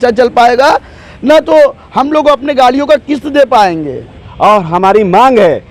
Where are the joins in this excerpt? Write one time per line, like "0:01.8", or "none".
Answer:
0:04.2